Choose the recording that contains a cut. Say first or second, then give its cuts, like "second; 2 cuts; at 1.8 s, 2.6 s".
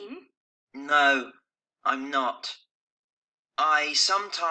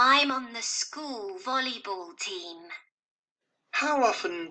second; 1 cut; at 2.1 s